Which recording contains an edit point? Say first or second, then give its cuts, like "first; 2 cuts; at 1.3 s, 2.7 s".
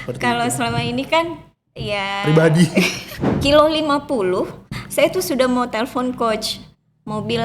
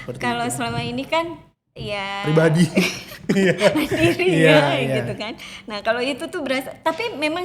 first; 1 cut; at 3.1 s